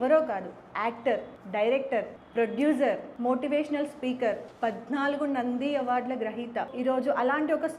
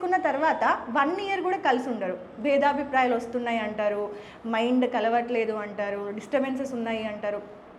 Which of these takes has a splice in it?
first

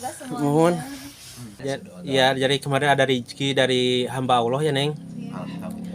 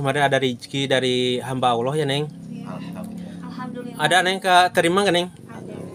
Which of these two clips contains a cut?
first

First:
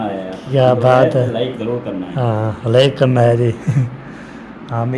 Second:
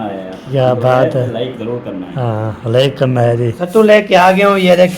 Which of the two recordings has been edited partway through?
second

